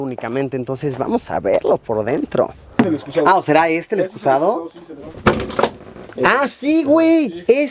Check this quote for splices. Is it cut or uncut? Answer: cut